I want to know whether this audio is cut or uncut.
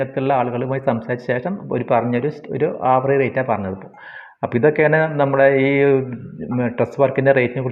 uncut